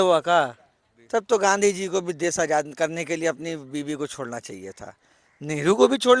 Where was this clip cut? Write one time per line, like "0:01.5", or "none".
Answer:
0:00.9